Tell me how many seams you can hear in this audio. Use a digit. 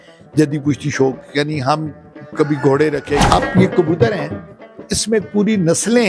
1